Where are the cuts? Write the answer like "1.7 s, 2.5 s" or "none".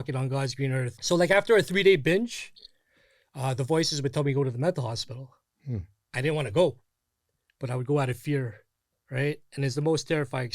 0.9 s